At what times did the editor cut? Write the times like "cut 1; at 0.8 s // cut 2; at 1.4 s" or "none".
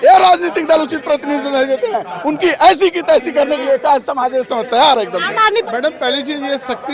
cut 1; at 5.6 s